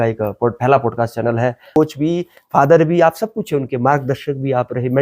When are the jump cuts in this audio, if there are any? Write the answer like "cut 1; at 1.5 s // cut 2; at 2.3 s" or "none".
cut 1; at 1.8 s